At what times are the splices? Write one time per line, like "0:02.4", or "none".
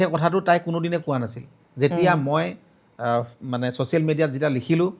none

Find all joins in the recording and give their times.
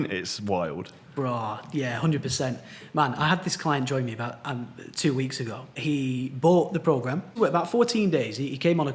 0:05.7
0:07.4

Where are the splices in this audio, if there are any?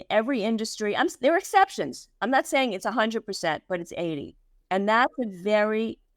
none

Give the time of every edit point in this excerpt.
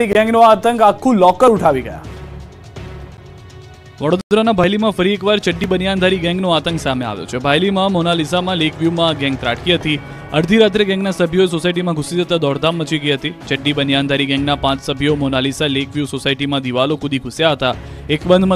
none

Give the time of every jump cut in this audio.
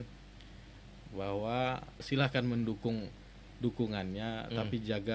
0:02.0

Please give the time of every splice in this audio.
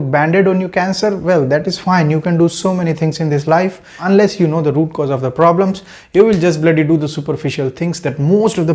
0:03.9

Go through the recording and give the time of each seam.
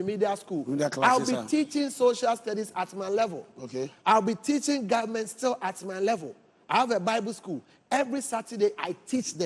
none

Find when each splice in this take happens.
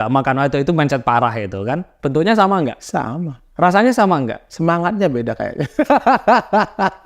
0:02.0
0:02.8
0:04.4

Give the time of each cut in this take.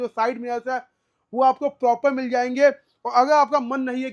none

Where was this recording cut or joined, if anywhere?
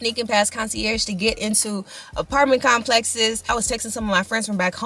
none

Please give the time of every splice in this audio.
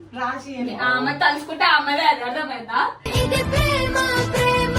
none

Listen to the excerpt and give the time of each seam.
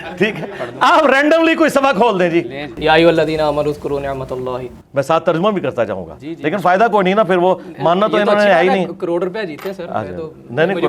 0:02.8
0:04.8

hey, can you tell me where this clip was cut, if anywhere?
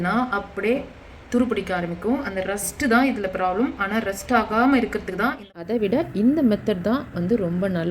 0:05.5

